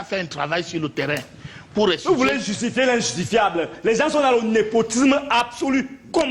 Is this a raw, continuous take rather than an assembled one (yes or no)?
yes